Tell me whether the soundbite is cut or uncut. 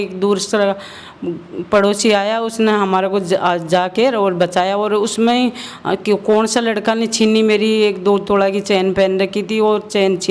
uncut